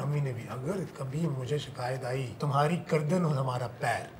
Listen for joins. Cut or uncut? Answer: cut